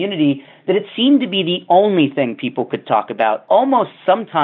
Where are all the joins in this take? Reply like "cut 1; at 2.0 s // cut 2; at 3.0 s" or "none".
cut 1; at 3.4 s